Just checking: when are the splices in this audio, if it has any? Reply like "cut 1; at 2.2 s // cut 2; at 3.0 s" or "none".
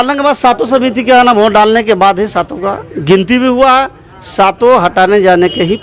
none